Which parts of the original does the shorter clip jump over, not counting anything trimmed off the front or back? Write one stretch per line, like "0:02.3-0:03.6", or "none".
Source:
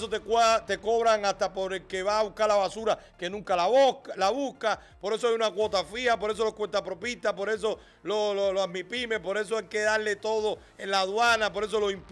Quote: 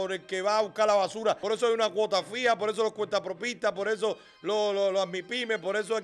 0:03.0-0:05.0